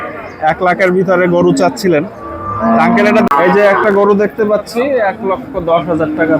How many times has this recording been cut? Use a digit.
1